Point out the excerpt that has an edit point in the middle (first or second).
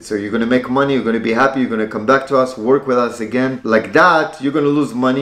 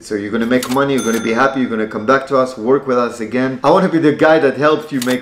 second